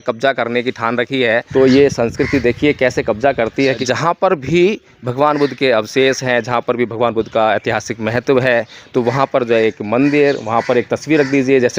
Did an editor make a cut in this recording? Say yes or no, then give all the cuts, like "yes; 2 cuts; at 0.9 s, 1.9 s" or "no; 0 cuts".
yes; 2 cuts; at 1.5 s, 3.8 s